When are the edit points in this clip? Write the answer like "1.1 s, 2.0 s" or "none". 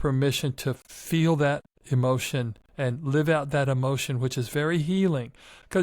0.9 s, 1.7 s, 2.6 s